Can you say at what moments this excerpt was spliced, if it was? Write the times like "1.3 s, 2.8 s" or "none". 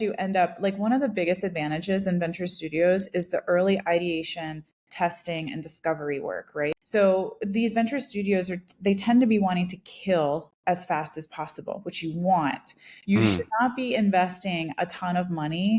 6.7 s